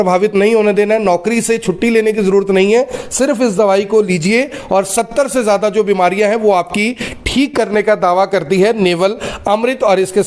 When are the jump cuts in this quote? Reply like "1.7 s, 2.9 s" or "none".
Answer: none